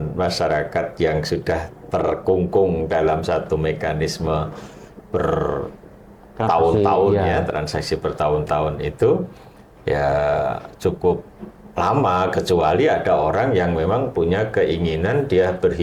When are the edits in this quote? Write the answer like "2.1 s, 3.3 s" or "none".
none